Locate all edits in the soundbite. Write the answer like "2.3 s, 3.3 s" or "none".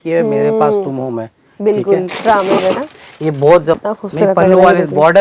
3.8 s